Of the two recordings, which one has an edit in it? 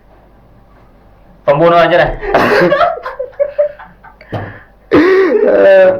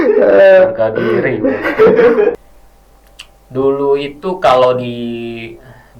second; 1 cut; at 2.4 s

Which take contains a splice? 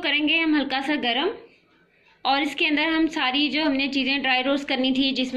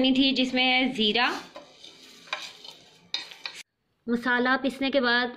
second; 1 cut; at 3.5 s

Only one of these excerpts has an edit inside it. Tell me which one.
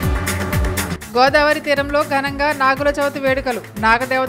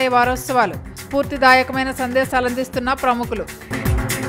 first; 1 cut; at 0.9 s

